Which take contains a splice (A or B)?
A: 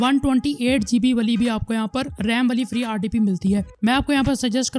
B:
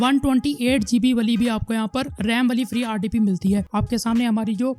B